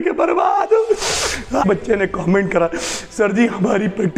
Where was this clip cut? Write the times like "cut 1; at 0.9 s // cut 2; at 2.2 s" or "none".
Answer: cut 1; at 1.6 s